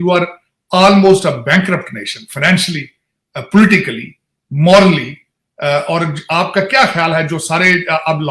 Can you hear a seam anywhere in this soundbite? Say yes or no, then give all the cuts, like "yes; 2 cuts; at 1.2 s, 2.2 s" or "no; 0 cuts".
no; 0 cuts